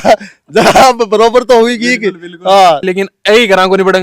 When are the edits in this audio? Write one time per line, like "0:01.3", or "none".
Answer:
0:02.9